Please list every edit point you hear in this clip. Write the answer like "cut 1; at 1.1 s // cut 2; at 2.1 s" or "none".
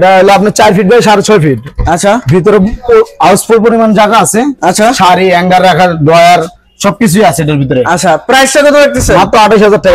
none